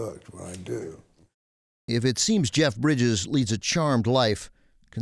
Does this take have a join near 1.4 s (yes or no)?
yes